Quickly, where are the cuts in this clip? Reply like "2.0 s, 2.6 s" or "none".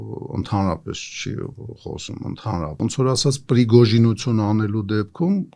2.7 s